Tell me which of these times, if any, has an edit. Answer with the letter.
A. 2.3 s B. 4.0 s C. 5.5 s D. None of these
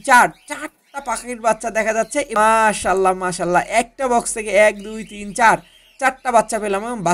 A